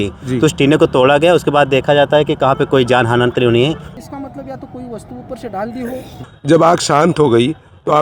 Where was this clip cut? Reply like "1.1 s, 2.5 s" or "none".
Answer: 3.9 s, 6.3 s